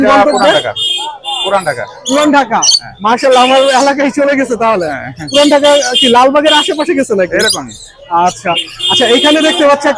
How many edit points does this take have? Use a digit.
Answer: 0